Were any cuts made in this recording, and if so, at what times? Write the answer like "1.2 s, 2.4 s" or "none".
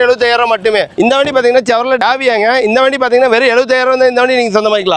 0.9 s